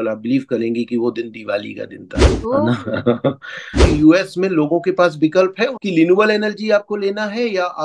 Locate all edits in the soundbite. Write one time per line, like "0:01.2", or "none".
0:03.8
0:05.8